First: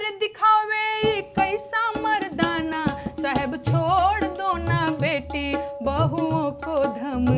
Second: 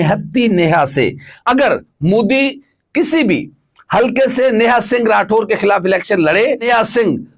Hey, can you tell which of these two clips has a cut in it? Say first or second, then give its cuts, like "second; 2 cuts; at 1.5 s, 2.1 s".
second; 2 cuts; at 1.3 s, 6.7 s